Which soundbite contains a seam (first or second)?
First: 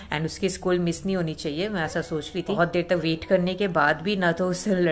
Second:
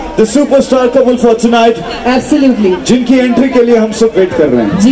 first